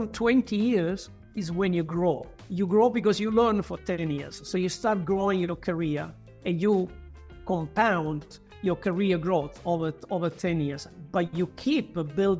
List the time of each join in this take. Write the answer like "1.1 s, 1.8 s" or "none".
none